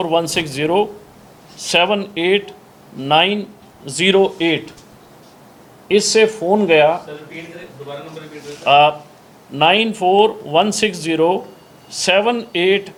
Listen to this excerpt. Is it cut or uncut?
uncut